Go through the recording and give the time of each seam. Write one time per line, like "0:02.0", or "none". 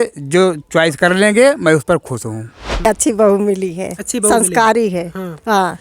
0:02.8